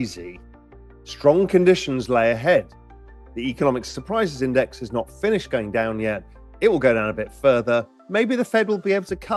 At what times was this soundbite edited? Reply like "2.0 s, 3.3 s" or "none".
none